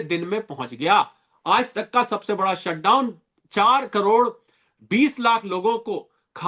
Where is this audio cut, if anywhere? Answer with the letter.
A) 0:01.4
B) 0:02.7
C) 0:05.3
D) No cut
D